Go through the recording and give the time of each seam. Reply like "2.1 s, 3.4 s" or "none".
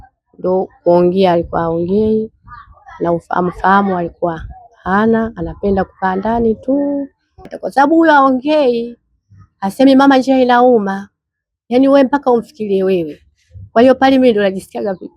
7.6 s